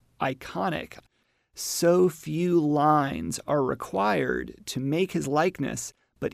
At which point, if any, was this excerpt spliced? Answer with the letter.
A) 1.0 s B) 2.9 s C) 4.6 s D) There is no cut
A